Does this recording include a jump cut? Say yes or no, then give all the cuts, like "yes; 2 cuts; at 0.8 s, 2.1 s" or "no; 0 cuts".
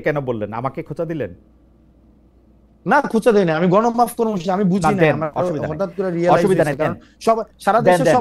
no; 0 cuts